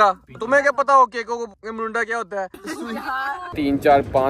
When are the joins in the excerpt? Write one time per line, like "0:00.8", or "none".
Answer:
0:02.6
0:03.5